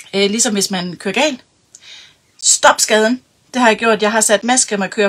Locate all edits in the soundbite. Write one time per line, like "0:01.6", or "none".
none